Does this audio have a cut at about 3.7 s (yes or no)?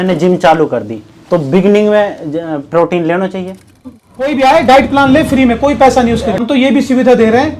yes